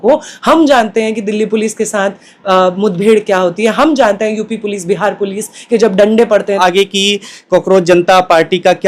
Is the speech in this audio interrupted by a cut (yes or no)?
yes